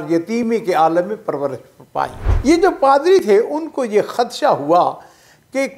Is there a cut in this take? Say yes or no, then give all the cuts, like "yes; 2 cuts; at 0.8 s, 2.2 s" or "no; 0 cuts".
yes; 1 cut; at 2.3 s